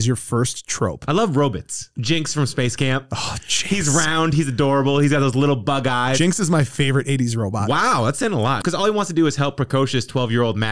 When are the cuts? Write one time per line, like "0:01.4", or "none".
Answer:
0:01.9
0:08.6